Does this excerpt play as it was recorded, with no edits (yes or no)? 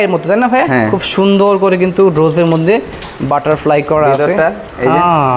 yes